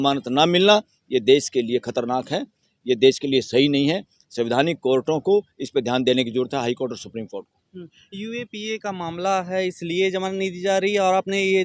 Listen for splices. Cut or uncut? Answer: uncut